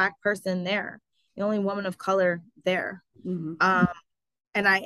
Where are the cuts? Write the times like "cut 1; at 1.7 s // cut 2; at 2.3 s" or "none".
none